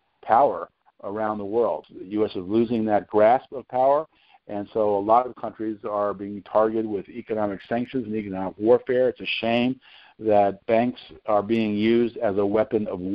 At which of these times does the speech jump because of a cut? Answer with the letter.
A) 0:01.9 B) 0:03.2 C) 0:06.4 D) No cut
A